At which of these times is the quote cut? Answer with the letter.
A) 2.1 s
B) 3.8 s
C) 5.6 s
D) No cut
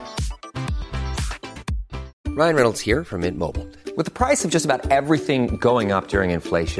A